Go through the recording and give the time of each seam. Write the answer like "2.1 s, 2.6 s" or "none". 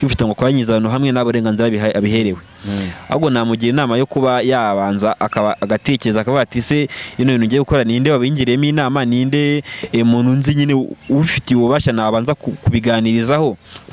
none